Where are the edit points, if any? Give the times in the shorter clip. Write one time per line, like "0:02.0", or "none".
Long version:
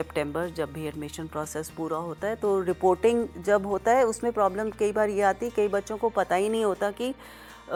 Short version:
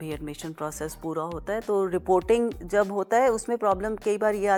none